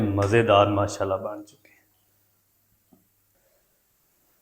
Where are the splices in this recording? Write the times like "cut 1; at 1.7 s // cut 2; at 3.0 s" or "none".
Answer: cut 1; at 3.2 s